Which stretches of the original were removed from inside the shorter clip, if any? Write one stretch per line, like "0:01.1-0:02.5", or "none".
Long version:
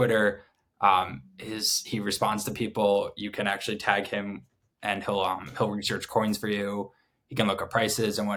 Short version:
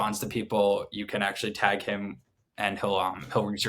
none